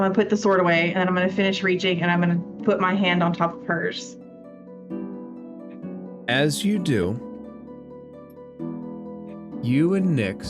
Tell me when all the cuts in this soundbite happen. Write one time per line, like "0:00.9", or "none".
0:03.9
0:06.2

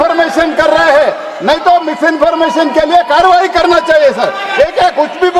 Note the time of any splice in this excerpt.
none

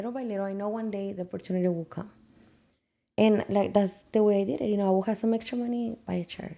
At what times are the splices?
none

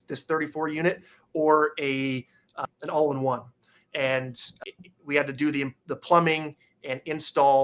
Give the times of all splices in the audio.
0:02.6
0:04.6

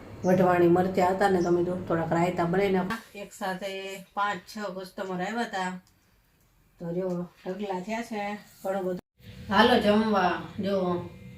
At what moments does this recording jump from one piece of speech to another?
0:02.9
0:09.0

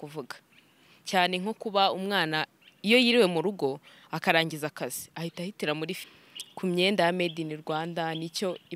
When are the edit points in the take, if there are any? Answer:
0:06.0

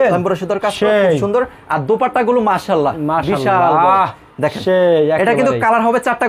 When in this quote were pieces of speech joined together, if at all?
none

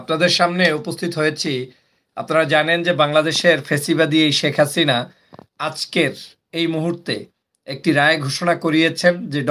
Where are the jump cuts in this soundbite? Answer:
none

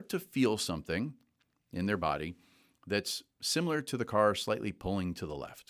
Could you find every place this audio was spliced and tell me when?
none

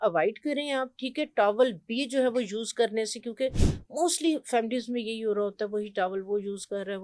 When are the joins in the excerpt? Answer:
none

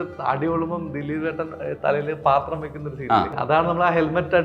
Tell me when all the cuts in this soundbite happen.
0:03.3

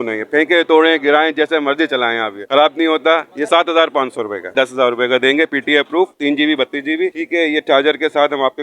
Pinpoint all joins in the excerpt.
0:04.5
0:07.1

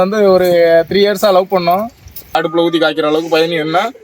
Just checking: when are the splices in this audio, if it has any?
0:02.3

